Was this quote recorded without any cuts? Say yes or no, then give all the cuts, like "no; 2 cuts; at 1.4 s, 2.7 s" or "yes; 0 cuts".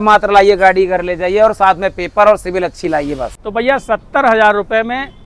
no; 1 cut; at 3.3 s